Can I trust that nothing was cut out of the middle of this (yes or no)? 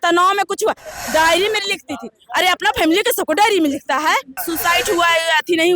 no